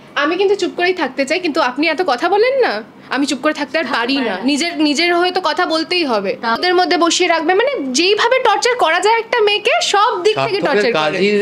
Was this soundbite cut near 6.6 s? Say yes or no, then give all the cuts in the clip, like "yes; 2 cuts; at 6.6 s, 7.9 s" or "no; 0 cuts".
yes; 1 cut; at 6.6 s